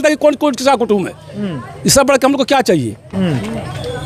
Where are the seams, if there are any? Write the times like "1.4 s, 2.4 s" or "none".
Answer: none